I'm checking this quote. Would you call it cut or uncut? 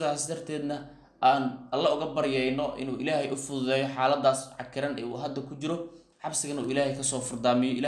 uncut